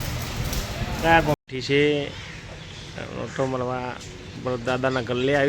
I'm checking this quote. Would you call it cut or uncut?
cut